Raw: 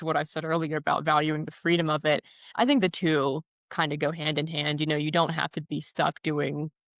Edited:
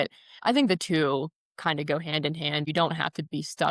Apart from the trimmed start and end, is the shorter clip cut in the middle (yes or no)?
yes